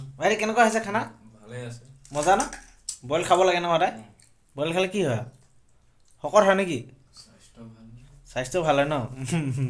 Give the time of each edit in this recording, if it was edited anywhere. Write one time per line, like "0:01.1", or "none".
none